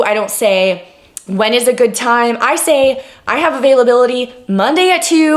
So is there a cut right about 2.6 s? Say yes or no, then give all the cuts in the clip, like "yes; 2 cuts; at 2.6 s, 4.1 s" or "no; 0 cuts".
no; 0 cuts